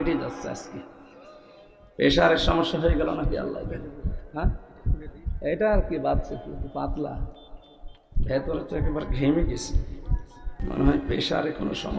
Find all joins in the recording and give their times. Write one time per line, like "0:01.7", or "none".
0:10.6